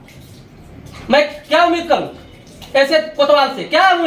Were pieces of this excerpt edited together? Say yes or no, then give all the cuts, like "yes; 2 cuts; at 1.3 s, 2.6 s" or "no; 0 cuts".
no; 0 cuts